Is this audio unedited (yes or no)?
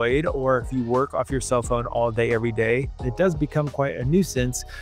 no